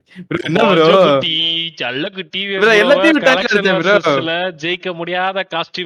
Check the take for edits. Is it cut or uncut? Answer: cut